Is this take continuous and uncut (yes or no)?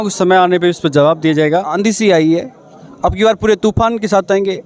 no